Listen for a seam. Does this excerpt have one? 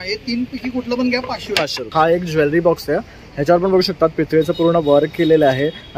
yes; 1 cut; at 1.8 s

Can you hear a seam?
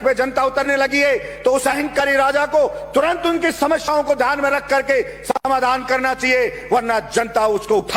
no; 0 cuts

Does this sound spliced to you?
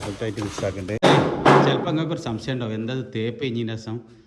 yes; 1 cut; at 1.0 s

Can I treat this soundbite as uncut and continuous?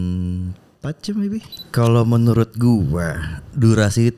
no; 1 cut; at 1.6 s

